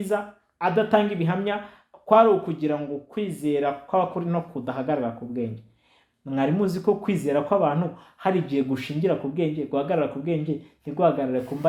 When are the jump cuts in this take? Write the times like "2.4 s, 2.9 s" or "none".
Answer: none